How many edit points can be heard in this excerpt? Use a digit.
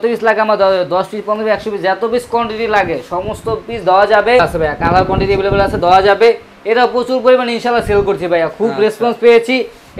1